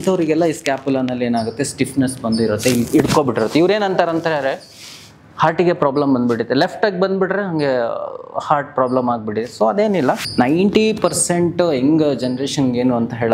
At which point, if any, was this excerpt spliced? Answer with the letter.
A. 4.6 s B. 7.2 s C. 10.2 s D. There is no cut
C